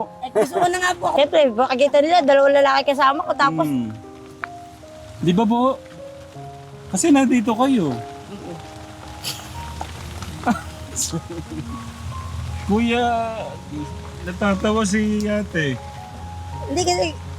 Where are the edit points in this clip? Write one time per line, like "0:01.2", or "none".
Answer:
0:01.1